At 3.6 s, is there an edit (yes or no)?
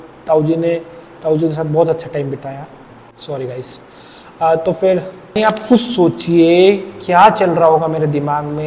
no